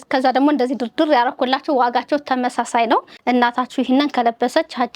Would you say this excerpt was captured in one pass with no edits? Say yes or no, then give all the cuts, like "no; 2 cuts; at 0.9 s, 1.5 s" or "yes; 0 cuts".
no; 1 cut; at 3.1 s